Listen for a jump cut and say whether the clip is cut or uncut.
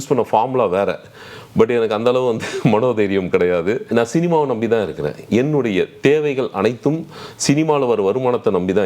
cut